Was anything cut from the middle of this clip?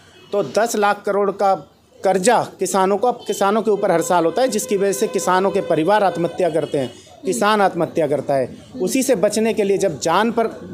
no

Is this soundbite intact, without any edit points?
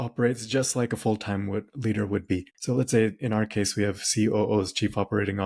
no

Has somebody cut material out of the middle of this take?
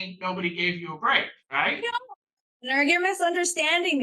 yes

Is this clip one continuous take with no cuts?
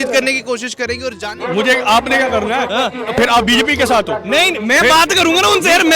no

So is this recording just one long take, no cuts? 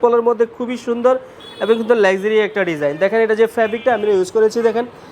yes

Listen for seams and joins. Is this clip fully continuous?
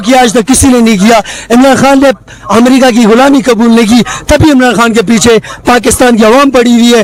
yes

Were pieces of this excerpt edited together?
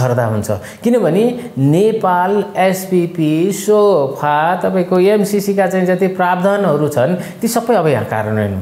no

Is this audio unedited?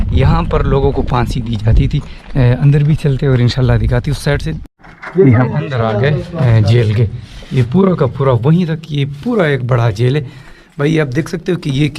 no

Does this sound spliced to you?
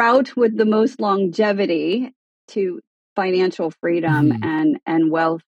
no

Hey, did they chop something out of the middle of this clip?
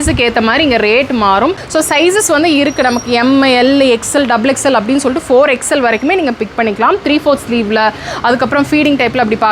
yes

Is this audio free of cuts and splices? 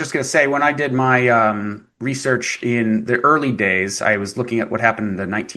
yes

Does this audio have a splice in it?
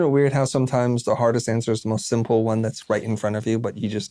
no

